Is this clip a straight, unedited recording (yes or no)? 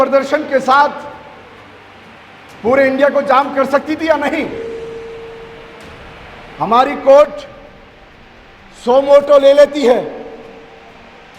no